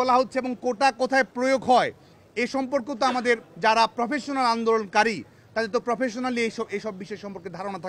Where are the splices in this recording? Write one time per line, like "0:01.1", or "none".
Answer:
none